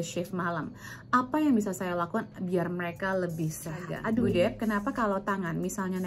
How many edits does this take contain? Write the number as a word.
one